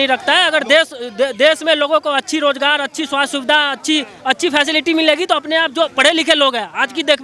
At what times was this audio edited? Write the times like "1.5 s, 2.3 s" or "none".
none